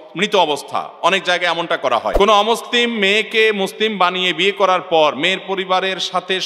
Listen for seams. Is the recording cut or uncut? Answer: cut